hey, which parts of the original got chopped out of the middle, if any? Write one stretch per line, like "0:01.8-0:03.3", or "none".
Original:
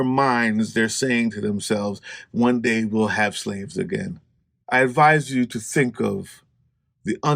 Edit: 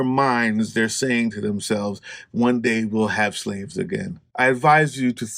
0:04.2-0:04.5

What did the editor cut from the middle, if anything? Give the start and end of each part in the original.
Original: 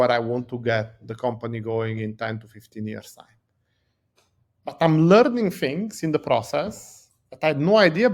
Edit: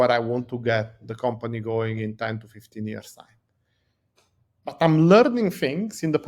none

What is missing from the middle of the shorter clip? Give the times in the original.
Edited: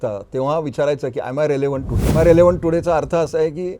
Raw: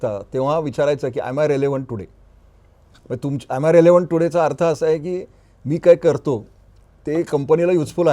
0:02.1-0:03.6

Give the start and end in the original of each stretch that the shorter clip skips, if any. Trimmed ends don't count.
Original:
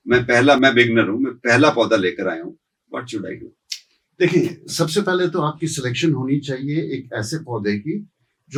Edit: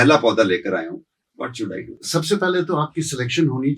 0:03.5-0:04.6

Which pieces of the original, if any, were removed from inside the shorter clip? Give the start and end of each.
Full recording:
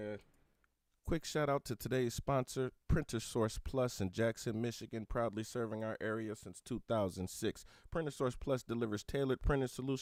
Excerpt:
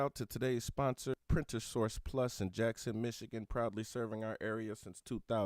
0:02.7-0:02.8

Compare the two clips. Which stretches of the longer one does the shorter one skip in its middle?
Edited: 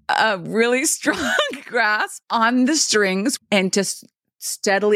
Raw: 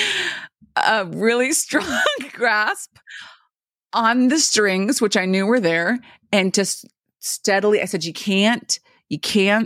0:02.8-0:03.8
0:05.0-0:06.2

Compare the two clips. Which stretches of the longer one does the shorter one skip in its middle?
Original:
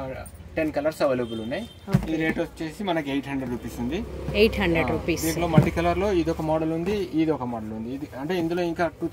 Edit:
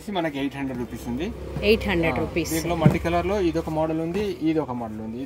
none

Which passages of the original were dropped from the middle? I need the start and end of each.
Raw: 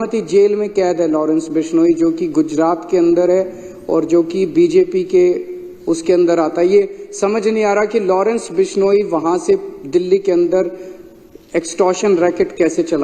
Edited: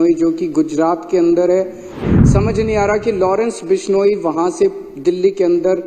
0:03.8-0:06.9

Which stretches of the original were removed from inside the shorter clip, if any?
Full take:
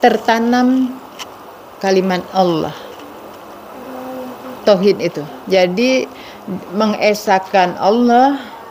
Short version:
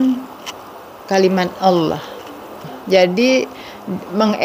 0:03.4-0:05.3

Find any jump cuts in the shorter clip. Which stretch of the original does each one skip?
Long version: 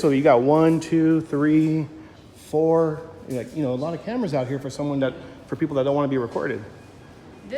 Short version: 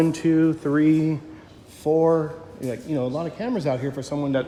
none

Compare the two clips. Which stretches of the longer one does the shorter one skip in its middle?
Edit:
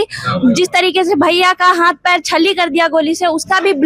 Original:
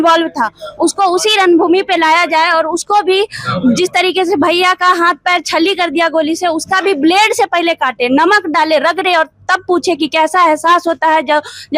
none

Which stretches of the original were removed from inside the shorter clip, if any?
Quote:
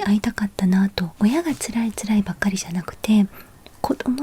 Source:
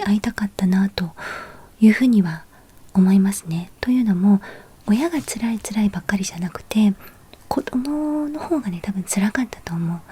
0:01.0-0:04.7

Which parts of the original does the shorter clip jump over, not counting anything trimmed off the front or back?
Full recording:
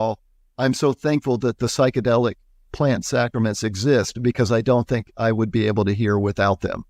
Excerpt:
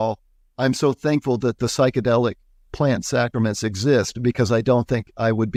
none

